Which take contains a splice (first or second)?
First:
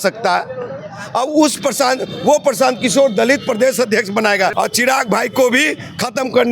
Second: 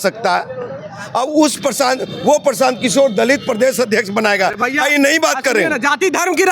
first